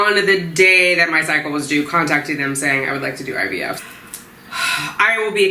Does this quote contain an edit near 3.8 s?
yes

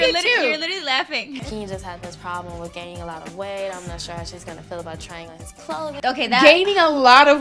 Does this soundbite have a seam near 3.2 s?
no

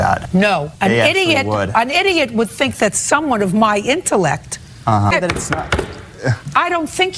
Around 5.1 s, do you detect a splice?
yes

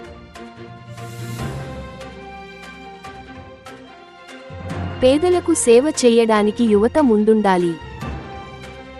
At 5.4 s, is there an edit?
no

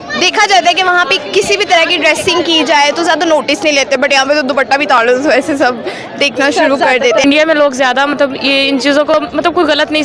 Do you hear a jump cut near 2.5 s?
no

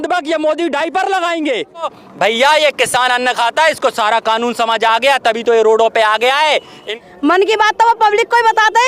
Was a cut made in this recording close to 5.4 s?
no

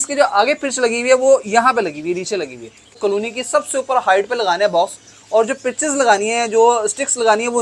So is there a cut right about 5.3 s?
no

